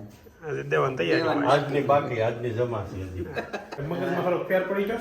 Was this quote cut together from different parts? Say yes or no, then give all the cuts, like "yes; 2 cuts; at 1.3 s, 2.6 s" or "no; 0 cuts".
yes; 1 cut; at 3.8 s